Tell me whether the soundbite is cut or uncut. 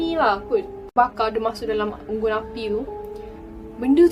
cut